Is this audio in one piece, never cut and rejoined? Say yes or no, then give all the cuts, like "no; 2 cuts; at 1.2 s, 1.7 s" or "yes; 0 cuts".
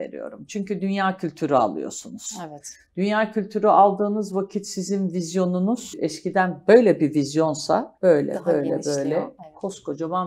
no; 2 cuts; at 6.0 s, 7.9 s